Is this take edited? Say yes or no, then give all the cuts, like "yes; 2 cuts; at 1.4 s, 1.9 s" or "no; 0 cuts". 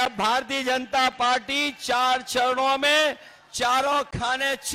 no; 0 cuts